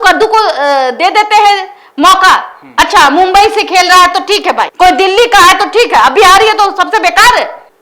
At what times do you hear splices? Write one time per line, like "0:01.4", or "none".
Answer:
none